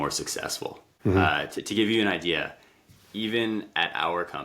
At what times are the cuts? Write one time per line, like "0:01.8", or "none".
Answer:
0:01.2